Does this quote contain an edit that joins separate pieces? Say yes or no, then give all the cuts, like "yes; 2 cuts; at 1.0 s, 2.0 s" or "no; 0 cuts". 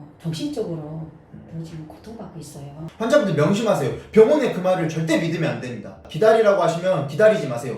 yes; 2 cuts; at 2.8 s, 6.0 s